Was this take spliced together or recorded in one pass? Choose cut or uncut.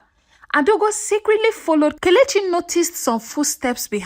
cut